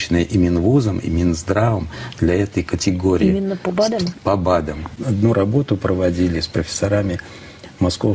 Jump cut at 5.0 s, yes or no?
yes